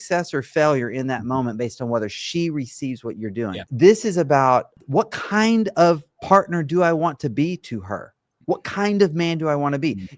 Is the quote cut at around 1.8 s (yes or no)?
no